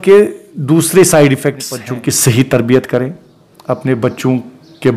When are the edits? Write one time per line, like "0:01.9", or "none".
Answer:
0:01.9